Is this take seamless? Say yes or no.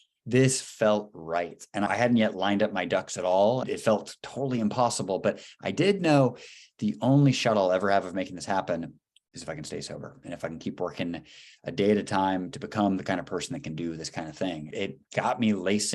no